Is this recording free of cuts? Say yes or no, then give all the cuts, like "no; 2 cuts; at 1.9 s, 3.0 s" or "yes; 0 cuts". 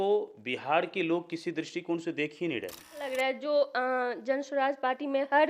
no; 1 cut; at 3.1 s